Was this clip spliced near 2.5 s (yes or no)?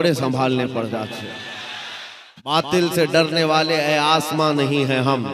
yes